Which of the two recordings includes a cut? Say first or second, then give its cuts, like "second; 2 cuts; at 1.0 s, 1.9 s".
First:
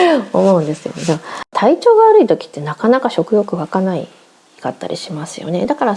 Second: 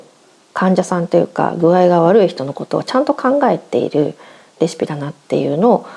first; 1 cut; at 1.5 s